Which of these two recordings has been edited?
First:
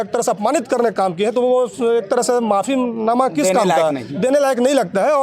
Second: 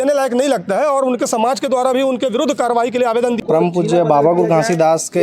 second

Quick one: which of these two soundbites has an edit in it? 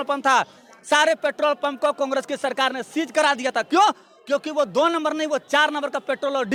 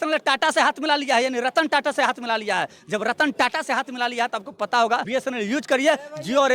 second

